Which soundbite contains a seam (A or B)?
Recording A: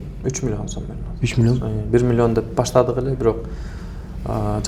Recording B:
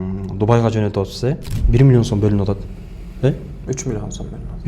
B